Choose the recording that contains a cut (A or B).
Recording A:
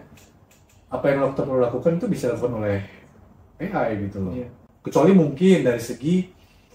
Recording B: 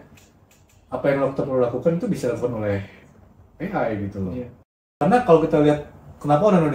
B